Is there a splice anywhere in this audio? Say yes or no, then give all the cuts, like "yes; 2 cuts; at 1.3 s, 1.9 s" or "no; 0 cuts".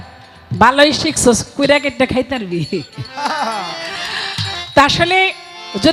no; 0 cuts